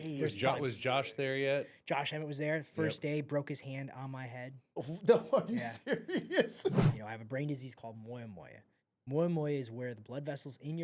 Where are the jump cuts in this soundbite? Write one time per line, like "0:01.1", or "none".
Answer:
0:06.8